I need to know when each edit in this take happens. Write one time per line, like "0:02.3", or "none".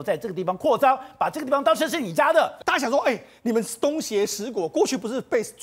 0:02.6